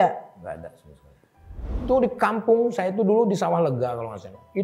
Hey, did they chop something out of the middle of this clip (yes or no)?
yes